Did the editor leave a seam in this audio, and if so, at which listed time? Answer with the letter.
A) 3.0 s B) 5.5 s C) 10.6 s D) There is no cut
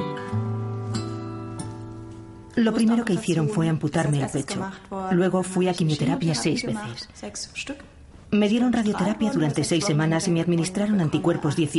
C